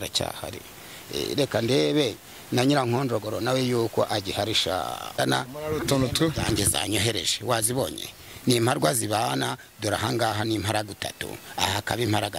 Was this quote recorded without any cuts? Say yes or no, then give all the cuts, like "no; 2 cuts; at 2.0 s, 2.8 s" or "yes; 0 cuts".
no; 1 cut; at 5.2 s